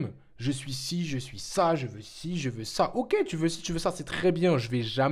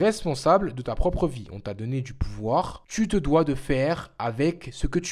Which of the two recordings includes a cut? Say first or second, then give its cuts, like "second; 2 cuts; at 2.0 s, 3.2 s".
second; 1 cut; at 2.8 s